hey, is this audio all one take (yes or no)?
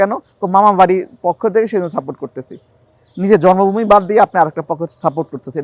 yes